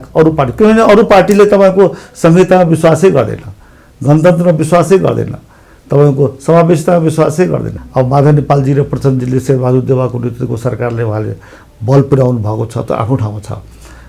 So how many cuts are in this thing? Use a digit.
1